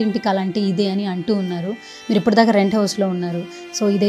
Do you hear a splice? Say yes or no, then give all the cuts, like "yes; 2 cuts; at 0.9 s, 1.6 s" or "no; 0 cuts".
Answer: no; 0 cuts